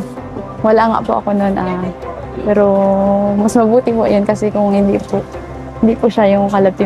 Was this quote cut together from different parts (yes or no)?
no